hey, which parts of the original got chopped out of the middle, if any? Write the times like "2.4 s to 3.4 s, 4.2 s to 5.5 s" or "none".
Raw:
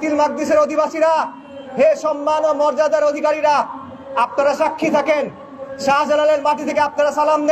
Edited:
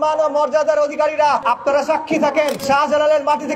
3.7 s to 4.1 s, 5.3 s to 5.8 s